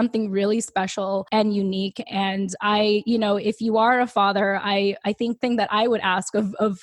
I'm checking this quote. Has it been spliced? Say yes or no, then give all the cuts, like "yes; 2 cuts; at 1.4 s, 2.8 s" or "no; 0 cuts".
yes; 2 cuts; at 1.2 s, 5.4 s